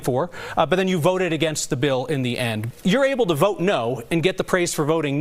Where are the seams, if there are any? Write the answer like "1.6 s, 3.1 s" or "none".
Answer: 2.7 s